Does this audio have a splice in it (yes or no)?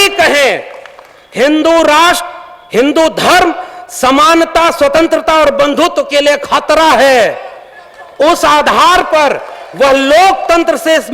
no